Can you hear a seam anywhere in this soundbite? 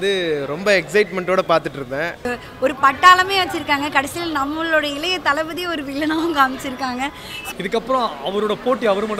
yes; 2 cuts; at 2.3 s, 7.3 s

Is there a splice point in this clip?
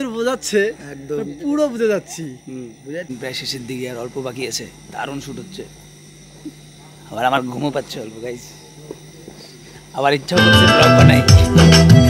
yes; 1 cut; at 3.2 s

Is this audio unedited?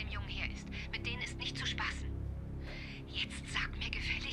yes; 0 cuts

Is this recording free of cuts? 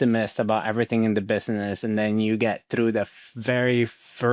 yes; 0 cuts

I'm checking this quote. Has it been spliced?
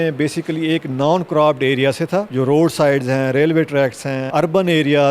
yes; 1 cut; at 4.2 s

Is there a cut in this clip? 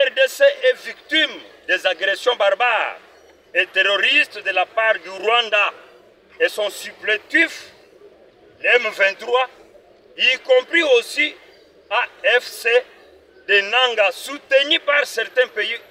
no; 0 cuts

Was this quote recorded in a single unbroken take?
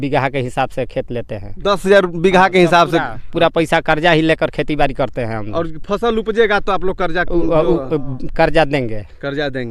yes; 0 cuts

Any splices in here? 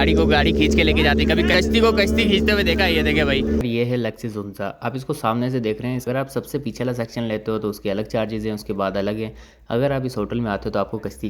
yes; 3 cuts; at 1.5 s, 3.6 s, 6.0 s

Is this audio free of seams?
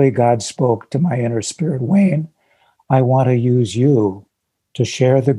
yes; 0 cuts

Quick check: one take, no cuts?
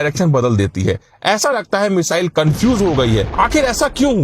no; 1 cut; at 3.3 s

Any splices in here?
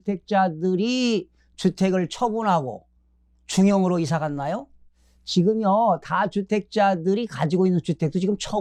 no; 0 cuts

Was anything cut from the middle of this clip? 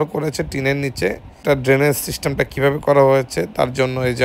yes; 1 cut; at 1.4 s

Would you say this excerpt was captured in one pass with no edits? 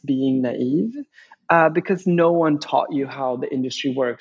yes; 0 cuts

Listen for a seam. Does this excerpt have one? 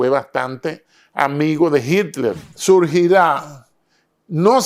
yes; 1 cut; at 2.5 s

